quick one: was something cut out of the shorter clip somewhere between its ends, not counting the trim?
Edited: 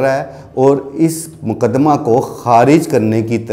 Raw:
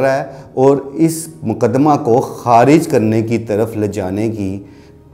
no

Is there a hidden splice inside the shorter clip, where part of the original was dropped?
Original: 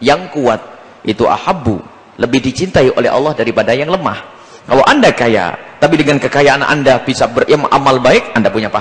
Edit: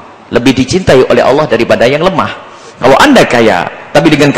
no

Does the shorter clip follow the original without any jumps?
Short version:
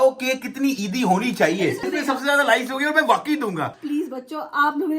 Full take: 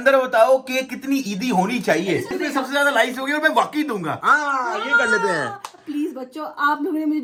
no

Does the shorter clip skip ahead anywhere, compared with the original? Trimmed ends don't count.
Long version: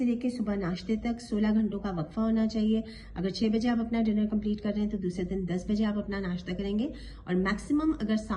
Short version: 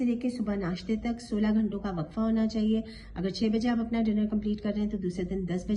no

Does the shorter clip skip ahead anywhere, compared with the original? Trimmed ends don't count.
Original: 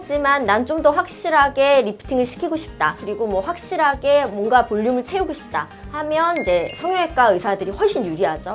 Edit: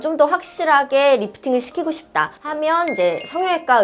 yes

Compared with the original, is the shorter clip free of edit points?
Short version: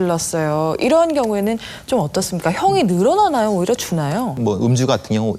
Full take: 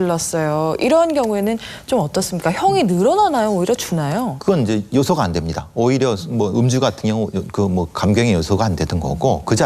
no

